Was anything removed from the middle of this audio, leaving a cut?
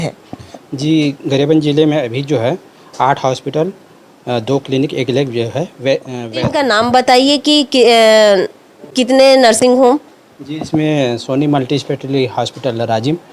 yes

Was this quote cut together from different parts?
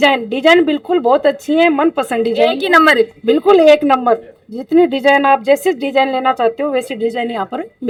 no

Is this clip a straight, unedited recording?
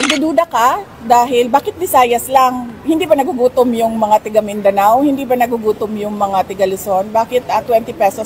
yes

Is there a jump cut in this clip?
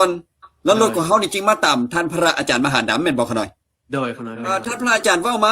yes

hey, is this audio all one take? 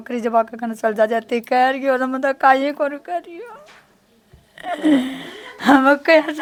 yes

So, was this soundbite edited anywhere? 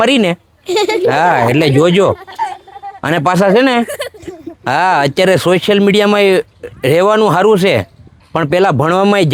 no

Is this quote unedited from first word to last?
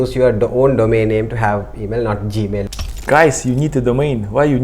no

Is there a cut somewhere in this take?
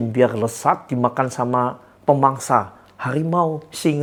no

